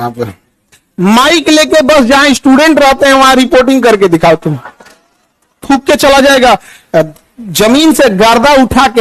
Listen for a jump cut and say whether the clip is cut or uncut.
cut